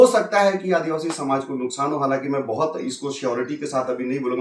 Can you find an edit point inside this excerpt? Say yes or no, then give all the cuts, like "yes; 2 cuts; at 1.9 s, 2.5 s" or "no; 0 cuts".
no; 0 cuts